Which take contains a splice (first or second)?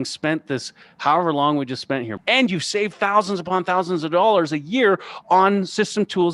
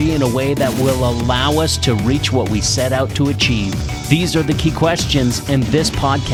first